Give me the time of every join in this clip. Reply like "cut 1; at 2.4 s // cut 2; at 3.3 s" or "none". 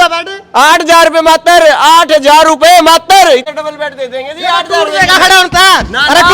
cut 1; at 3.4 s